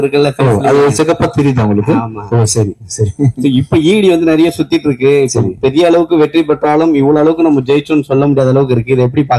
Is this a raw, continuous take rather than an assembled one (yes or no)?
yes